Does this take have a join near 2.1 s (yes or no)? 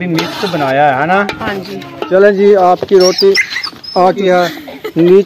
yes